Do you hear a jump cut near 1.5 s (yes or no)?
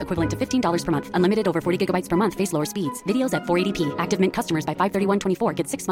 no